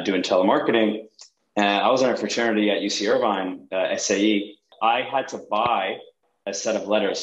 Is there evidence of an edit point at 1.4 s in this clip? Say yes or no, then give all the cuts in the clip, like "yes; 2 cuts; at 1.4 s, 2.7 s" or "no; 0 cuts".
no; 1 cut; at 4.7 s